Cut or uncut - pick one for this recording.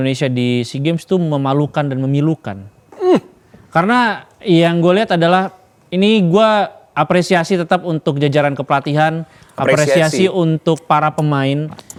uncut